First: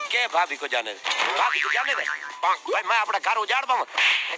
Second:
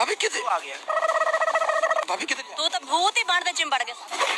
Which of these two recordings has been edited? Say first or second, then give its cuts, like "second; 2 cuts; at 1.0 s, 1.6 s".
second; 1 cut; at 2.1 s